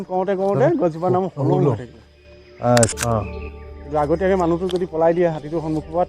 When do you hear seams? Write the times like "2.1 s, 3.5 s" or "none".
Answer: 2.9 s